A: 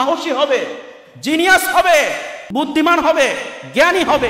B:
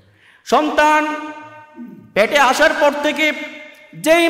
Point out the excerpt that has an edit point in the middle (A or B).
A